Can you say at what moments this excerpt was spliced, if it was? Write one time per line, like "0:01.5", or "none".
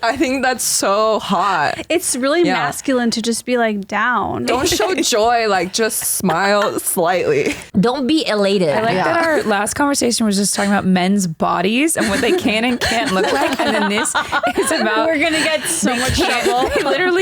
0:04.5
0:07.7
0:08.8